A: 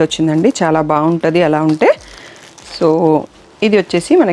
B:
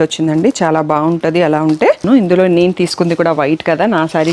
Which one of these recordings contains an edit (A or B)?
B